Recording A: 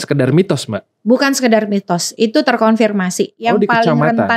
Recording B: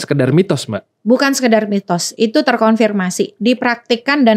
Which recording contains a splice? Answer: A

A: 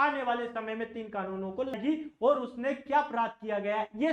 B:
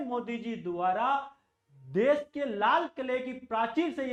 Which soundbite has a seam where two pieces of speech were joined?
A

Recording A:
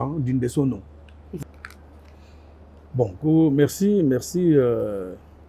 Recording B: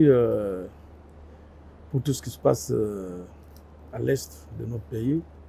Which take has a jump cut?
A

